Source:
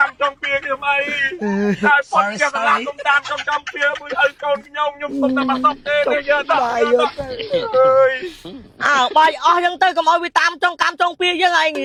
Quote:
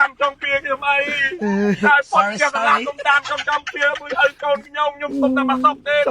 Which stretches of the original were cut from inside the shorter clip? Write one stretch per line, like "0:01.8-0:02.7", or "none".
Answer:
none

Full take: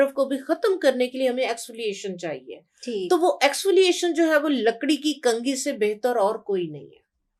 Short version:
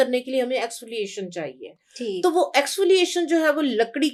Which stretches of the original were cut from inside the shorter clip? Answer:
none

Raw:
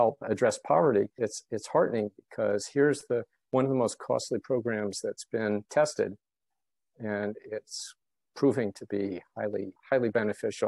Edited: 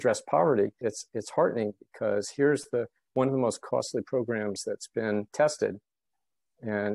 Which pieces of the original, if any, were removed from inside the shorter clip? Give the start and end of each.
none

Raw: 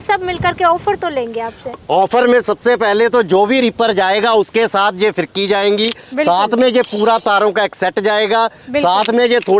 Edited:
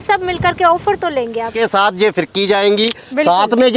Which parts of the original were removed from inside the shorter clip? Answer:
0:01.5-0:04.5

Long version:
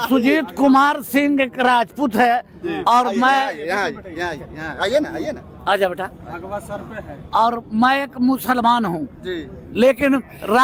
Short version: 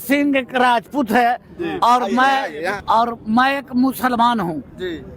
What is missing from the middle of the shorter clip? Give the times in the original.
0:03.8-0:07.2

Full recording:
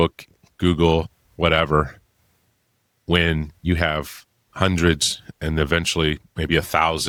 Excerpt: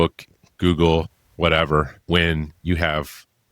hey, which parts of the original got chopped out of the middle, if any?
0:02.0-0:03.0

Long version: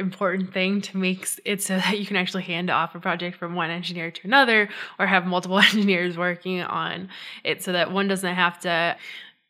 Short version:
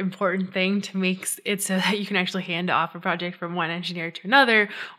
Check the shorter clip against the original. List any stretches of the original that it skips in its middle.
none

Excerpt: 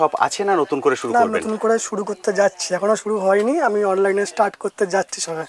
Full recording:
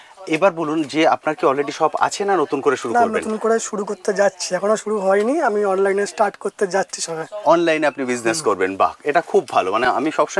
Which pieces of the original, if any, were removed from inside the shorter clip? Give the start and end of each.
none

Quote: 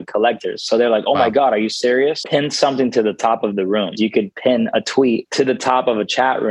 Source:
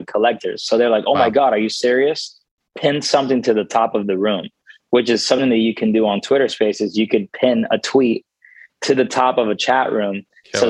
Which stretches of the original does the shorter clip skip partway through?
0:02.2-0:02.7
0:04.5-0:06.9
0:08.2-0:08.8

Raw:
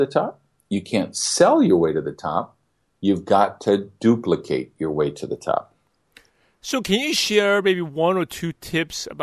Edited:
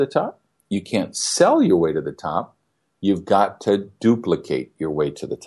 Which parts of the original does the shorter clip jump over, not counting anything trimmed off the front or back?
none

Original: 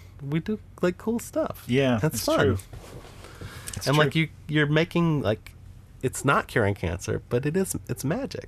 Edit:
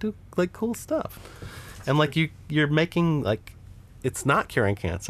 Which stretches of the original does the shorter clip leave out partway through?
0:01.6-0:03.1

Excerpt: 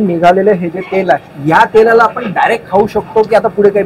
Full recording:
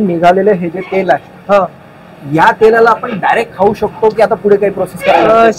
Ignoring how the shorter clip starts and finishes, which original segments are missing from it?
0:01.3-0:02.2

